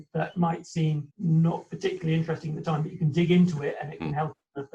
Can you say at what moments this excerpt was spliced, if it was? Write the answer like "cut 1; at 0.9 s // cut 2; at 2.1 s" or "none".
cut 1; at 1.1 s